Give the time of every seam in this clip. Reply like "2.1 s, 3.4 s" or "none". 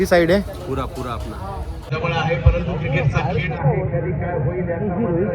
1.8 s